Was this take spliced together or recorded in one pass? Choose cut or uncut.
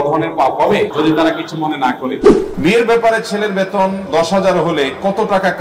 cut